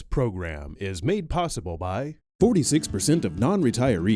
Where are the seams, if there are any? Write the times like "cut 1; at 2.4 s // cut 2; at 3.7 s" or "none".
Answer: cut 1; at 2.2 s